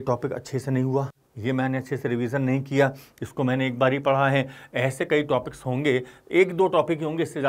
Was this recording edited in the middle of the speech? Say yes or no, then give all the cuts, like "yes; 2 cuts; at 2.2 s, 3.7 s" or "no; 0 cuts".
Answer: no; 0 cuts